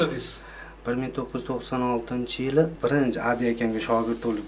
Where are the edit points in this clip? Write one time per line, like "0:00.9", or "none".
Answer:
0:02.7